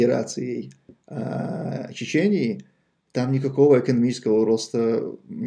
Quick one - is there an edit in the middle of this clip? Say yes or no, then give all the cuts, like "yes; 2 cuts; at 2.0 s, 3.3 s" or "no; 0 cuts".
no; 0 cuts